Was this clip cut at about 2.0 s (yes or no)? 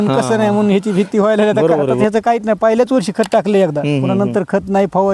yes